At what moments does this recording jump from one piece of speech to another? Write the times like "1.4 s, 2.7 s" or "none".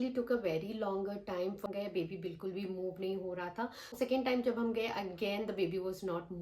1.6 s, 3.9 s